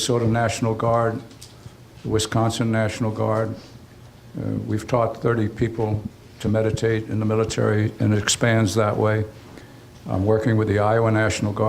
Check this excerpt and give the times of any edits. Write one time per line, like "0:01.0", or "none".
0:05.7